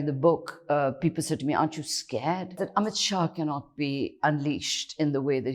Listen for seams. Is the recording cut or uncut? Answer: cut